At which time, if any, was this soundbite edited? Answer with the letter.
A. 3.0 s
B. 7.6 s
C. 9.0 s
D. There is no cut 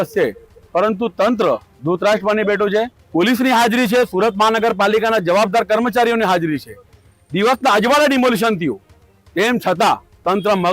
A